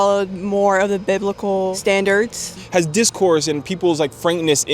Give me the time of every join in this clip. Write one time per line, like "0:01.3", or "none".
0:01.8
0:02.6